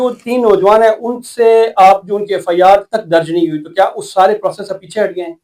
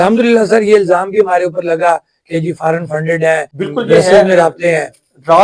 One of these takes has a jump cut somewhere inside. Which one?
second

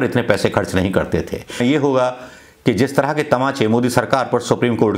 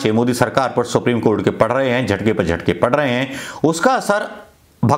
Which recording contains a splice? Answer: first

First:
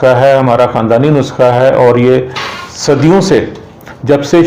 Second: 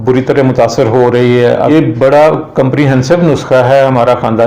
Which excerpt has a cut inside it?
second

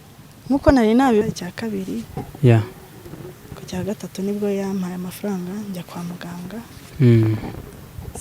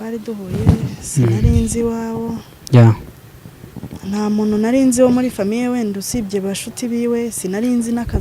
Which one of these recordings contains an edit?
first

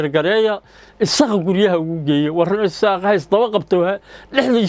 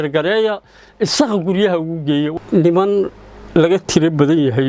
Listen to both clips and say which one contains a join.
second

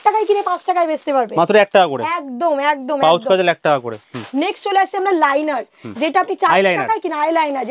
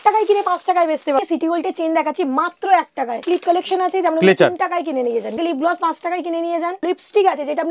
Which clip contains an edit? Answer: second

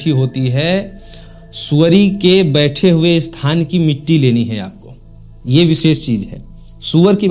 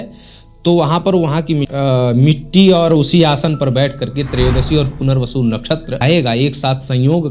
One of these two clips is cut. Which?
second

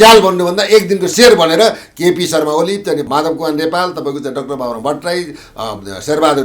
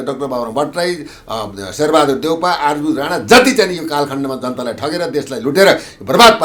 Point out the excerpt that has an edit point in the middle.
first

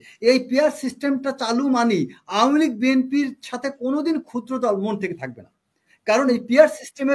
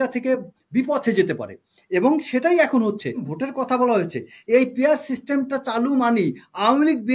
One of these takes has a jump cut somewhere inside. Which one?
second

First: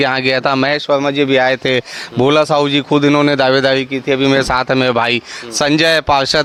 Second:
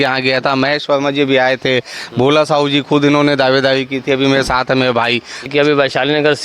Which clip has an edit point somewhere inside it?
second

